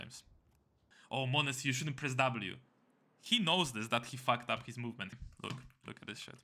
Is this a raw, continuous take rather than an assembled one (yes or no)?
no